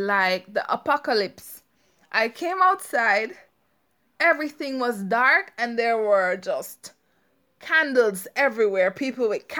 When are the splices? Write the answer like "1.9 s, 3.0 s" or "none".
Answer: none